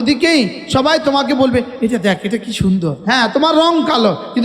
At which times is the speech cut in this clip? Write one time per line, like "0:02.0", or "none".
0:03.0